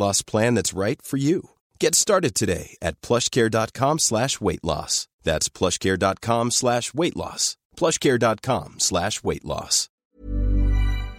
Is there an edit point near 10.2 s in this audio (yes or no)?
yes